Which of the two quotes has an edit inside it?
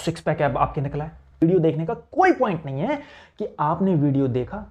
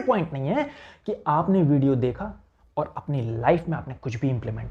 first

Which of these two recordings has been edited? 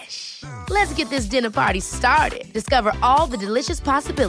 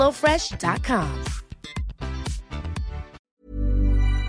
second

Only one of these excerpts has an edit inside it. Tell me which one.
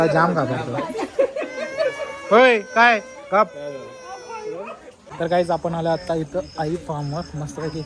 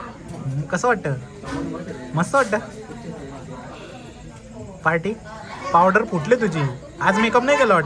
first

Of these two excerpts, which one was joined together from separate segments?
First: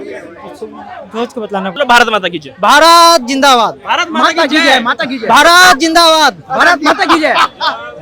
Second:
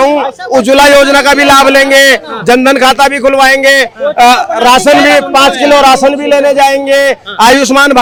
first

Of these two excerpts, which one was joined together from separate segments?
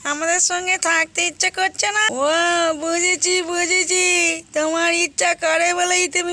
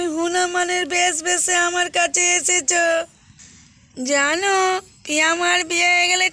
first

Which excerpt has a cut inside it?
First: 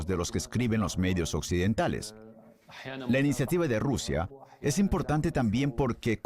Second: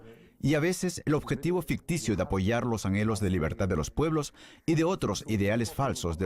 second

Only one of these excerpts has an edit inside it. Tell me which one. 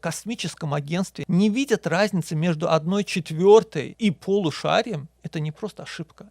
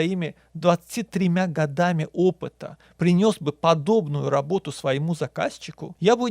first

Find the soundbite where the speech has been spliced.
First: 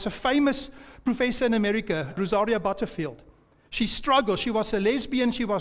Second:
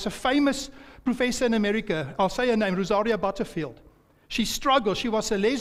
first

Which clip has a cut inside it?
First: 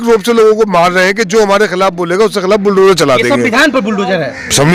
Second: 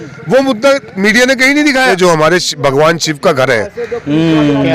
second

